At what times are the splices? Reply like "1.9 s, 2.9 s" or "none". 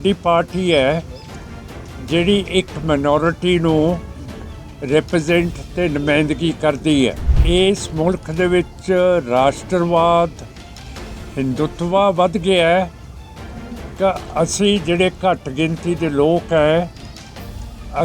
7.3 s